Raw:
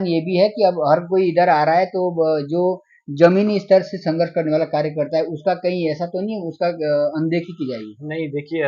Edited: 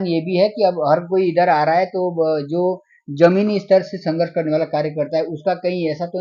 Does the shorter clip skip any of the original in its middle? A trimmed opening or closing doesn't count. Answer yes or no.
no